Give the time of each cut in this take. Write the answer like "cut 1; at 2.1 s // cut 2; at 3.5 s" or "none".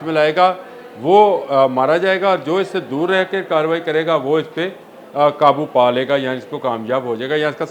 none